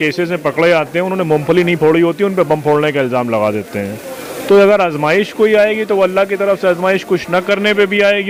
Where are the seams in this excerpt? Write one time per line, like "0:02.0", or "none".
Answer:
none